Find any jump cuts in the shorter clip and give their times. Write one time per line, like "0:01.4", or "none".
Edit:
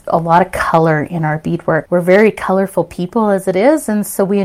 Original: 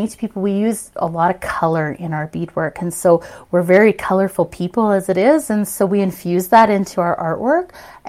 0:01.8